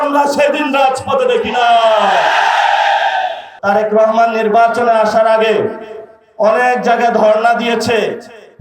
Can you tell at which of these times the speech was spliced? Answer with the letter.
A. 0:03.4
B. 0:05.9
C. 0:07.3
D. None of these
A